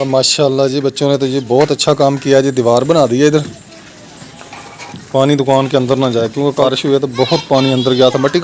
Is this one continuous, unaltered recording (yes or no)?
no